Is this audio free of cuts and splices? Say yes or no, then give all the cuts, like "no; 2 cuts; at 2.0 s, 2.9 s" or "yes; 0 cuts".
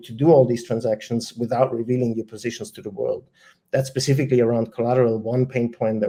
yes; 0 cuts